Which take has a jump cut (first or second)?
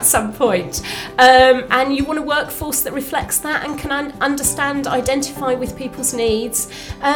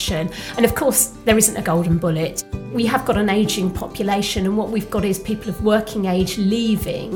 second